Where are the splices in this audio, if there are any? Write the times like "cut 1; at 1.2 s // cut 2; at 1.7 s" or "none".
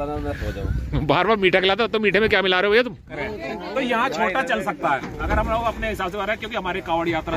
cut 1; at 3.1 s